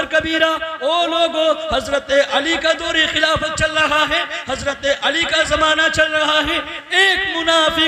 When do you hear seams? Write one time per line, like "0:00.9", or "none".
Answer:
none